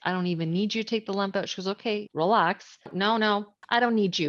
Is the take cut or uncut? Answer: cut